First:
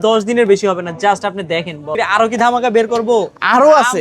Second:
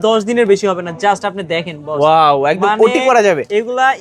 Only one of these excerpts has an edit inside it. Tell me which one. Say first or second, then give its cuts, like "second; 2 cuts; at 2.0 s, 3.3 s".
first; 1 cut; at 1.9 s